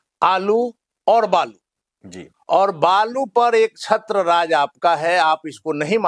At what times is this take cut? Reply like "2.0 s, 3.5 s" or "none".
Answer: none